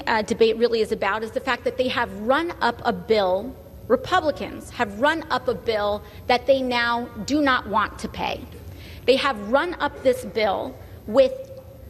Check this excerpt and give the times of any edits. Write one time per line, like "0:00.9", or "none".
none